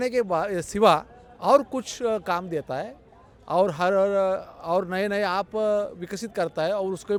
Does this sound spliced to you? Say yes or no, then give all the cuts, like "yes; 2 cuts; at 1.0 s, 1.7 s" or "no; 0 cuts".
no; 0 cuts